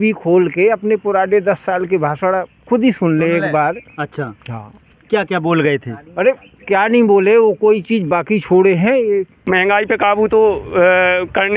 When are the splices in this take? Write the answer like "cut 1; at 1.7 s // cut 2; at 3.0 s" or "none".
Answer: cut 1; at 9.3 s